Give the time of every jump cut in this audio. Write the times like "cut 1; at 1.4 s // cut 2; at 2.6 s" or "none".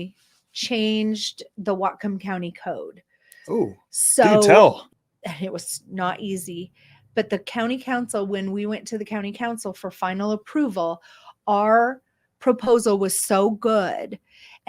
cut 1; at 4.9 s